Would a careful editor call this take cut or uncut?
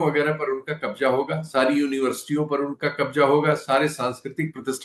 uncut